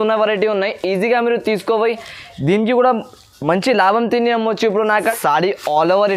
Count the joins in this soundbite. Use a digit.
1